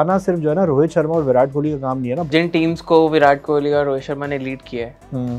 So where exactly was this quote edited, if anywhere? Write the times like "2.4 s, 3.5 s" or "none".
2.3 s